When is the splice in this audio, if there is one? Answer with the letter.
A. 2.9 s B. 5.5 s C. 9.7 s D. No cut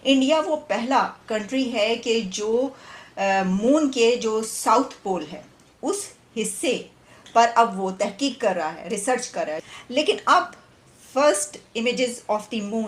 C